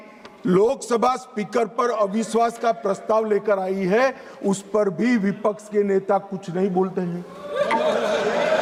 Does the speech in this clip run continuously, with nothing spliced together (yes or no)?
yes